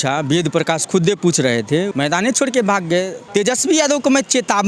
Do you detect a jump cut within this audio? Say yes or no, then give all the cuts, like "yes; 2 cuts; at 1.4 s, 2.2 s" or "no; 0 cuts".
yes; 2 cuts; at 1.9 s, 3.2 s